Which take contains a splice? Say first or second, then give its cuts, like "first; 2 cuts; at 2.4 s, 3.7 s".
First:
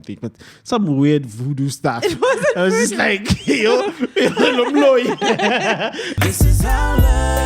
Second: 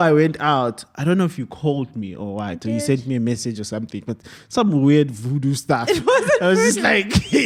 first; 1 cut; at 6.1 s